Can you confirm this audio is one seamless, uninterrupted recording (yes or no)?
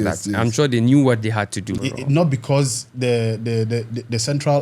no